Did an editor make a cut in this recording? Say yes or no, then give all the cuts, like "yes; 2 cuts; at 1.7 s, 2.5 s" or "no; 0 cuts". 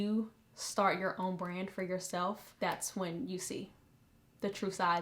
yes; 1 cut; at 2.5 s